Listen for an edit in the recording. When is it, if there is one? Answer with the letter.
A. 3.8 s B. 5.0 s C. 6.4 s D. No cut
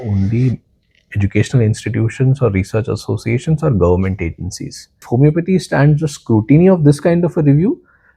B